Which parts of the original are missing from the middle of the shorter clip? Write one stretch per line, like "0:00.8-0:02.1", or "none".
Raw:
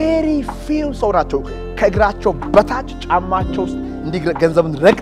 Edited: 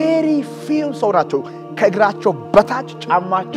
none